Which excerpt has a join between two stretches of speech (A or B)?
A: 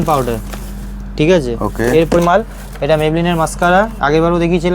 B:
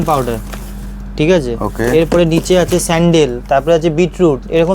A